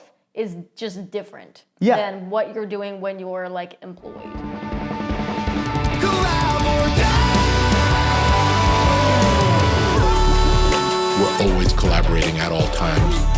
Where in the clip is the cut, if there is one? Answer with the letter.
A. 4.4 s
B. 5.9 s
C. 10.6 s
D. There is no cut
A